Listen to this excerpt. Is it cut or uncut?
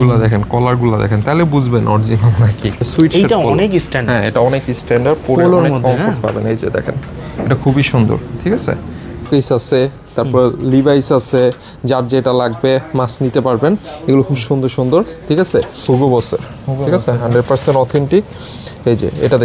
cut